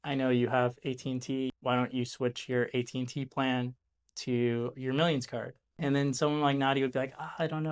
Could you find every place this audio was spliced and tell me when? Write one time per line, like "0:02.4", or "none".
0:01.5
0:05.8

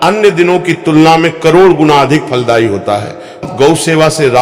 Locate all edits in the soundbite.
0:03.4

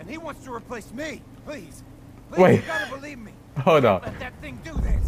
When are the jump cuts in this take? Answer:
none

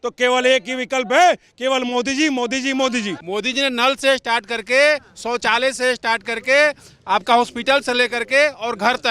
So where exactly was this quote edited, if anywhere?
0:03.2

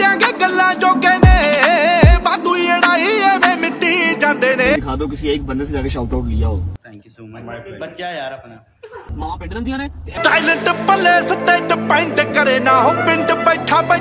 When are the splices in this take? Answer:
none

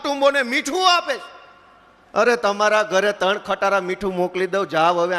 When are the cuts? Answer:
none

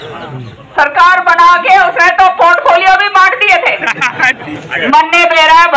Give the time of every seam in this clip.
none

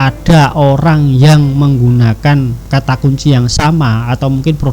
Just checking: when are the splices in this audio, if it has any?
0:02.6

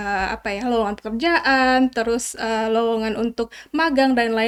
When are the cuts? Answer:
none

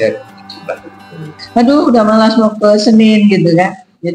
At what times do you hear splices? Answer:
0:01.3

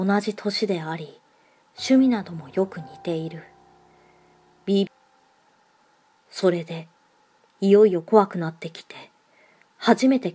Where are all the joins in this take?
none

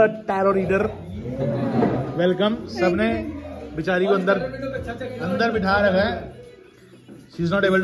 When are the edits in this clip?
none

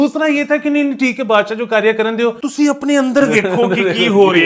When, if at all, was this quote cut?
0:02.4

